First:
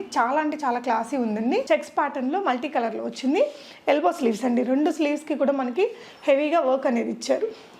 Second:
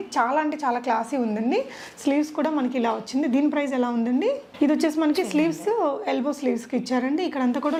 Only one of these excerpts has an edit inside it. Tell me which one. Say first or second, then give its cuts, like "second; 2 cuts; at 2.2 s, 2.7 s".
first; 1 cut; at 1.6 s